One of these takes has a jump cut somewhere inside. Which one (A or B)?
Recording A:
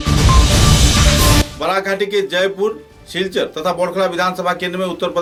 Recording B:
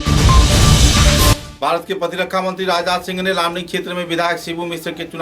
B